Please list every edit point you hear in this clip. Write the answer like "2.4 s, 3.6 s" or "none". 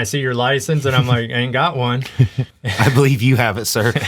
none